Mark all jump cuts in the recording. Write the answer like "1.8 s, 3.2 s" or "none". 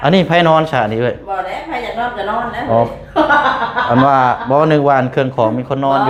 none